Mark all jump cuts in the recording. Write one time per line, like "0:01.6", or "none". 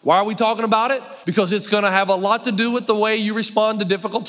0:01.1